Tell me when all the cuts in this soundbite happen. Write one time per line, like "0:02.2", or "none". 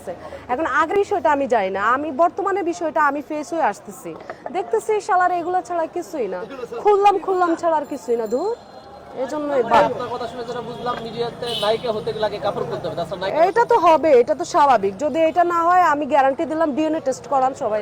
0:00.9